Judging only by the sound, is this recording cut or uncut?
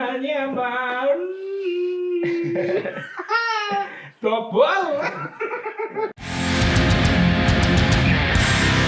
uncut